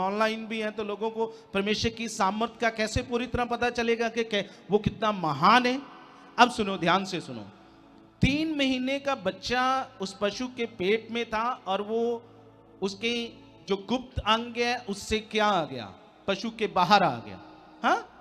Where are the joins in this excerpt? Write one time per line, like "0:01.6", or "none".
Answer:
none